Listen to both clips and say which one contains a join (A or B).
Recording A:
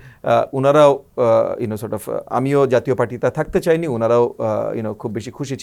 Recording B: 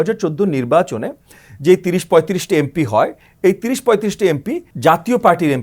B